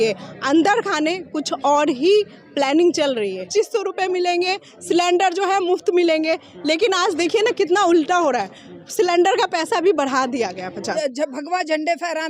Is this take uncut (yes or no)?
no